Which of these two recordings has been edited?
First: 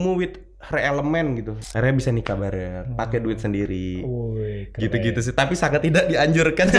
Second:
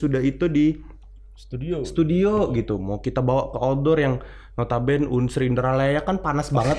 first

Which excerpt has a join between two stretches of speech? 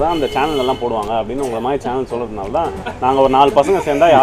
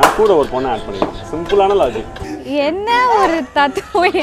second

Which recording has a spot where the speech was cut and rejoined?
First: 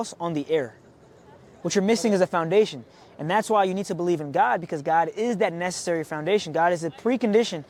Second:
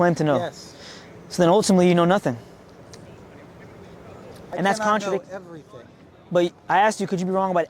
second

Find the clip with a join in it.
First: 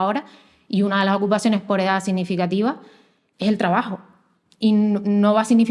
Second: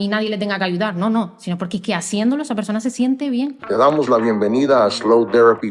second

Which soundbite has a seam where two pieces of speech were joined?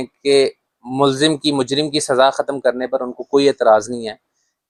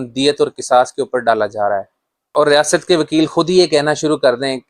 second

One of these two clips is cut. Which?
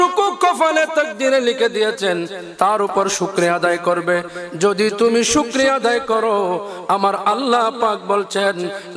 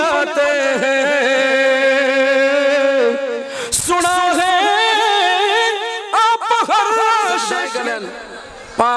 second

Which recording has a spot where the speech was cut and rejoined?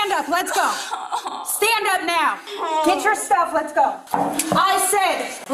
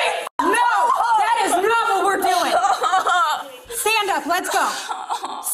first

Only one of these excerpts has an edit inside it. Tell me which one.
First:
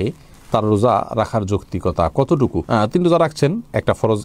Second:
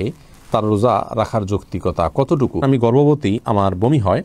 second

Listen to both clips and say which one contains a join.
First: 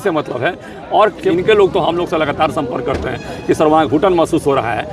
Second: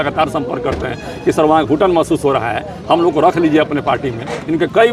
first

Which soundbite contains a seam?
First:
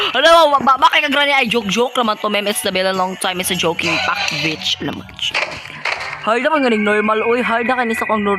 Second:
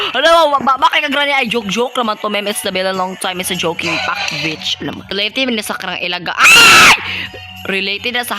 second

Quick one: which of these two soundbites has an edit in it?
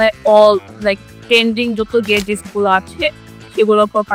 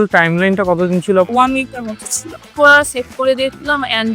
second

